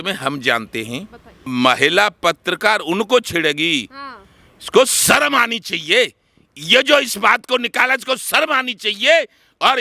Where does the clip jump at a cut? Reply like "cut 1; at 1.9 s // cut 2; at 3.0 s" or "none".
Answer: cut 1; at 1.5 s